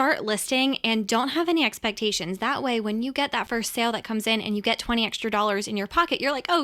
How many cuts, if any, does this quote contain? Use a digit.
0